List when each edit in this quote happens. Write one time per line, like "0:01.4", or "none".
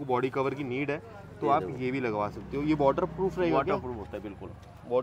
none